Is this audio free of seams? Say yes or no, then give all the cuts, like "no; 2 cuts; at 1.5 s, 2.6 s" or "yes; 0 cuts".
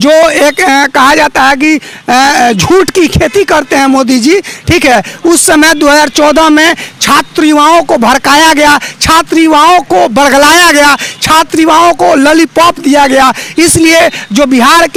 yes; 0 cuts